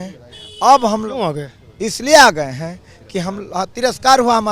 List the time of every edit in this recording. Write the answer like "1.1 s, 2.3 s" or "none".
none